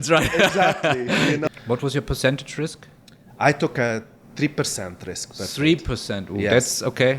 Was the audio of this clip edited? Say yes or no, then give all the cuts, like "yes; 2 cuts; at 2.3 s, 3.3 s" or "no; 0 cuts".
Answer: yes; 1 cut; at 1.5 s